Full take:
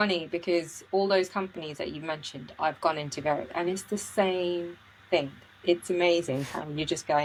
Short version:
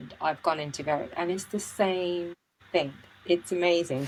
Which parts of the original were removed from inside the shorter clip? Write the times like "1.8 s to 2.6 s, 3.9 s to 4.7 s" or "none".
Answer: none